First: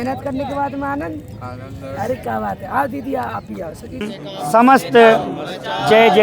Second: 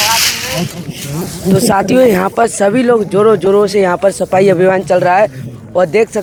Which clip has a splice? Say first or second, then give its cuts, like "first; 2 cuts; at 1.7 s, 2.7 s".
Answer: first; 1 cut; at 4.1 s